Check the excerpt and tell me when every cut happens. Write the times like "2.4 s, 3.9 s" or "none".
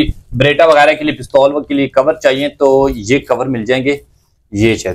none